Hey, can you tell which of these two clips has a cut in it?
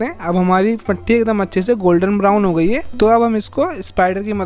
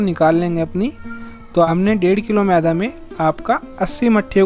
second; 1 cut; at 1.7 s

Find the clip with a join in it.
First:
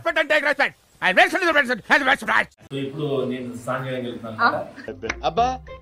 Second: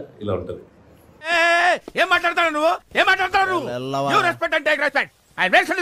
first; 1 cut; at 2.6 s

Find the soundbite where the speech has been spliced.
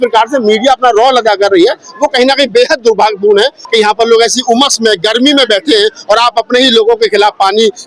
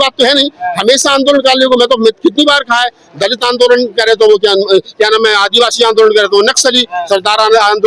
first; 1 cut; at 3.6 s

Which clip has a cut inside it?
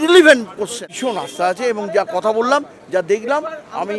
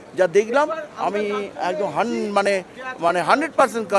first; 1 cut; at 0.9 s

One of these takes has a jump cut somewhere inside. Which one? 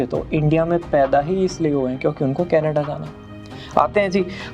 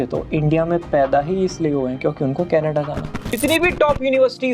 second; 1 cut; at 3.3 s

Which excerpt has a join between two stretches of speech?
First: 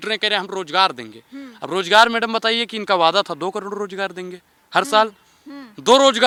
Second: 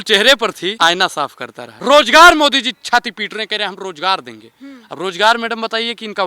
second; 2 cuts; at 0.7 s, 1.6 s

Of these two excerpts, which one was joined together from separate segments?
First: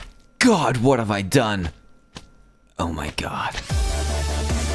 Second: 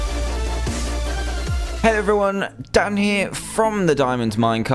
second; 1 cut; at 1.5 s

